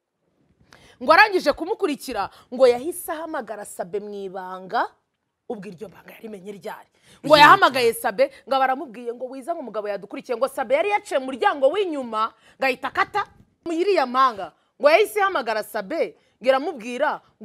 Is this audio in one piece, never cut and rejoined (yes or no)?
no